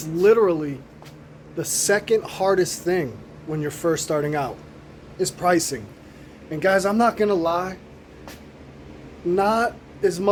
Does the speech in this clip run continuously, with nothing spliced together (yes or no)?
yes